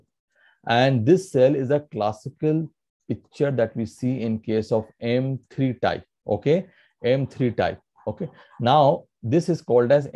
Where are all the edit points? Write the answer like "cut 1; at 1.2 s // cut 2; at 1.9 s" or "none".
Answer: none